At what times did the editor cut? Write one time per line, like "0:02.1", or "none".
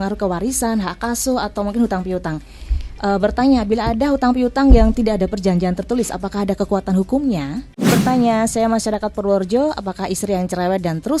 0:07.9